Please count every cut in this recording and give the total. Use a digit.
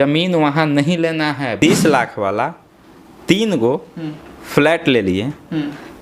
1